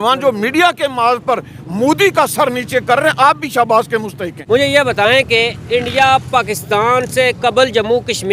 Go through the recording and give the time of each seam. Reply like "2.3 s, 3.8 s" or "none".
4.3 s